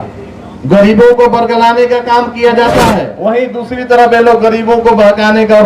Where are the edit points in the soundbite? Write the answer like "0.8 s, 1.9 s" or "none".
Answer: 3.1 s